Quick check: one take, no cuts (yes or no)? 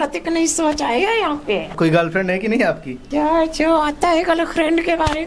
no